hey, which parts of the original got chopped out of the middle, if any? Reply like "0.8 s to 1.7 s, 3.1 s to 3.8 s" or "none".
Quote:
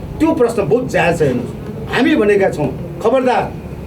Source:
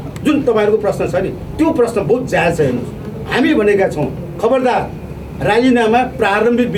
none